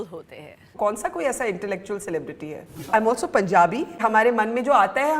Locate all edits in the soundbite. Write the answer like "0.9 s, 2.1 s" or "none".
2.9 s, 4.0 s